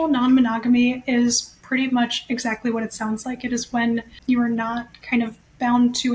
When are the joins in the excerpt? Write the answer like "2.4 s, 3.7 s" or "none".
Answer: 4.2 s